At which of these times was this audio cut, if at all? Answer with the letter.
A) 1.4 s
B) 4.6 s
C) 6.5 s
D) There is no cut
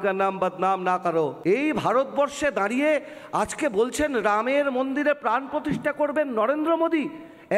A